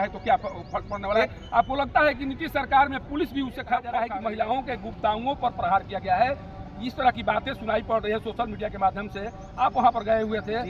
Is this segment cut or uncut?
cut